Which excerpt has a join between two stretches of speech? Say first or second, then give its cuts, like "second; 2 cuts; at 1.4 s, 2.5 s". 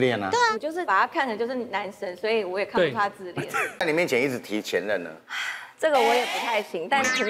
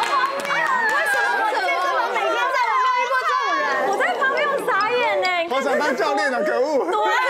first; 1 cut; at 3.8 s